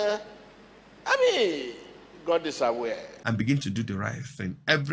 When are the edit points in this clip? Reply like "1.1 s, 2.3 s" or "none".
3.1 s